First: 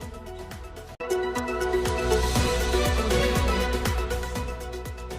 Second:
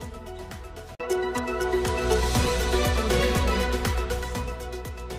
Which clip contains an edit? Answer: first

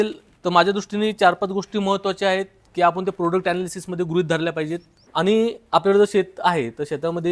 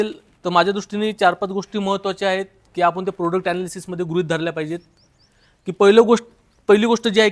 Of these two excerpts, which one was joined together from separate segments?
first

